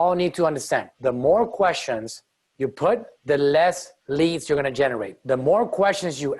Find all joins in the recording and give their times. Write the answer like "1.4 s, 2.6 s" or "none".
0.9 s, 3.1 s, 3.9 s, 5.1 s